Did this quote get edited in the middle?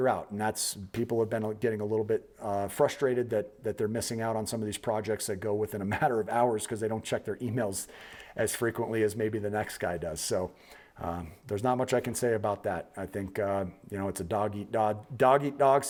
no; 0 cuts

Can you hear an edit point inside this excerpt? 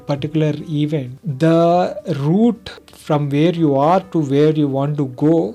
no; 0 cuts

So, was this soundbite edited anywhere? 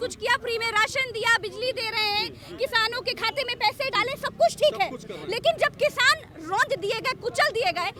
no; 0 cuts

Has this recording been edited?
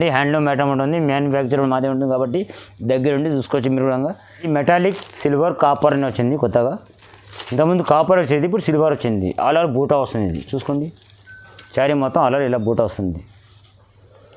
yes; 1 cut; at 4.5 s

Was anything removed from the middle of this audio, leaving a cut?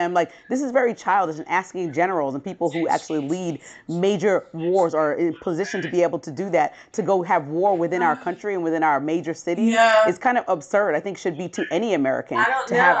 no; 0 cuts

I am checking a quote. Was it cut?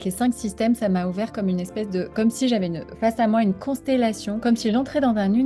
no; 0 cuts

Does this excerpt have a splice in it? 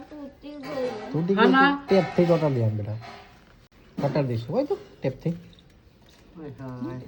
no; 0 cuts

